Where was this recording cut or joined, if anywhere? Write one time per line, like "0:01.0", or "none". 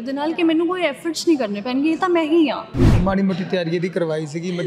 0:02.9

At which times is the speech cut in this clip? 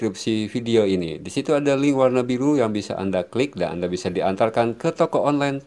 none

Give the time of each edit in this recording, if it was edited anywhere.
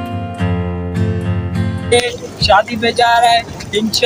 0:01.9

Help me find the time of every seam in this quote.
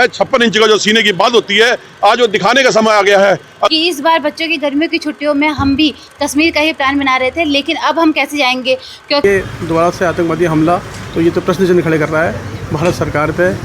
0:03.7
0:09.2

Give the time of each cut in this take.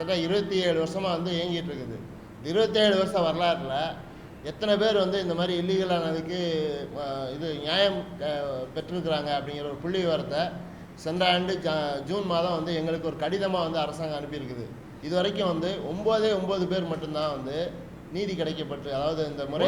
none

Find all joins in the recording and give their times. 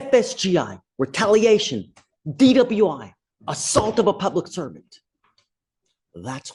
none

